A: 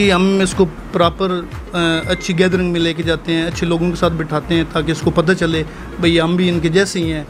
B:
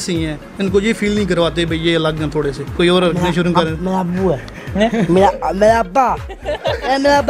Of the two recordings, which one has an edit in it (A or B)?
B